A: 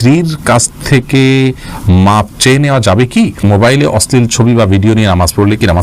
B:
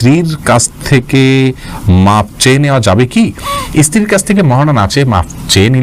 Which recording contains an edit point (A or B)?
A